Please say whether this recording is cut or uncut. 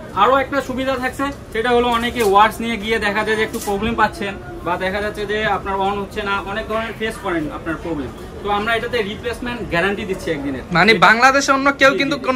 uncut